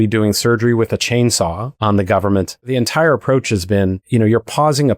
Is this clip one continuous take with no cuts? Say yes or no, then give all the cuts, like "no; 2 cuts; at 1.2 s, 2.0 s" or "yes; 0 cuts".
no; 3 cuts; at 1.7 s, 2.6 s, 4.0 s